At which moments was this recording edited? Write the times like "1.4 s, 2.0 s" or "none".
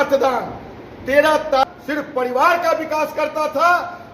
1.6 s